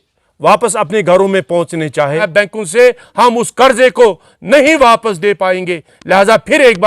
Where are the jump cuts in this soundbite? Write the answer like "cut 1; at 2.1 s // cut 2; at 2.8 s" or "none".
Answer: cut 1; at 2.3 s